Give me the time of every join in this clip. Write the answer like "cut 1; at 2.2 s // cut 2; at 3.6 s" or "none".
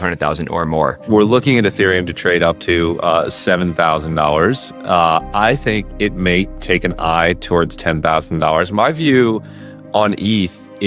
cut 1; at 1.1 s